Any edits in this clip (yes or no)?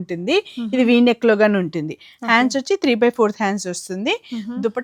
no